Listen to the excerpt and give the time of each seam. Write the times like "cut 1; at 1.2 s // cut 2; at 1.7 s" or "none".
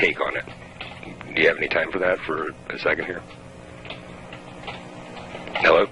none